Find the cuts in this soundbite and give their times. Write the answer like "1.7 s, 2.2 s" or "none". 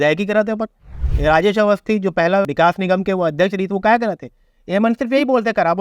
2.5 s